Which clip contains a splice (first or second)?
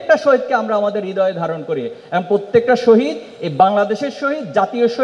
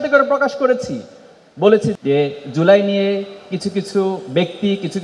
second